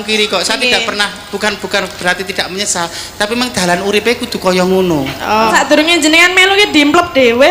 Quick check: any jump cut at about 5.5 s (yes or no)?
yes